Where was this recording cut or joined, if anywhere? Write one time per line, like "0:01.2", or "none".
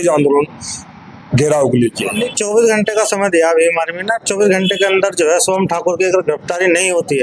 0:02.3